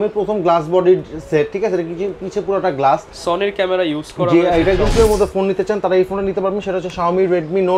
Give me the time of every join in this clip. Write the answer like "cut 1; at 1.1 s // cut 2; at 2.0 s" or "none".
cut 1; at 4.9 s